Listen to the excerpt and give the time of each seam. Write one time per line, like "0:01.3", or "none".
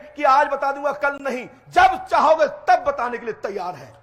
none